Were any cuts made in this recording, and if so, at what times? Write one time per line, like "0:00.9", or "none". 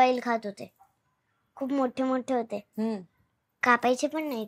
none